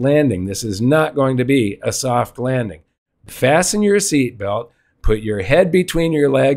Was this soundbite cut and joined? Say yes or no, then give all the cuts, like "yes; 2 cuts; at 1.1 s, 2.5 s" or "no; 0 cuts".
yes; 1 cut; at 3.1 s